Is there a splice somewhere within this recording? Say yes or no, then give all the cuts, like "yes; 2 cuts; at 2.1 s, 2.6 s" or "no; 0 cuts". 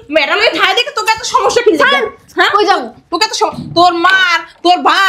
no; 0 cuts